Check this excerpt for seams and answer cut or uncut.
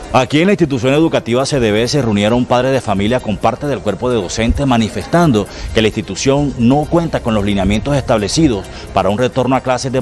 uncut